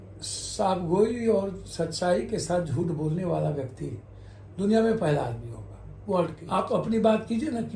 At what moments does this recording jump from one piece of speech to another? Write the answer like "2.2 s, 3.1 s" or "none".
6.4 s